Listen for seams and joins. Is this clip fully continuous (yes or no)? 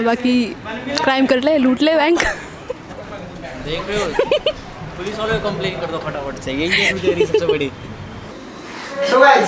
yes